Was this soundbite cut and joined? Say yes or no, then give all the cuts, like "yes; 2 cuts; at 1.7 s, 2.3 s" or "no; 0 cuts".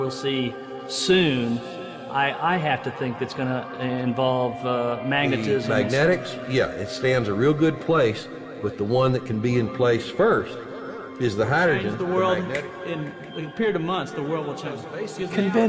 yes; 1 cut; at 9.4 s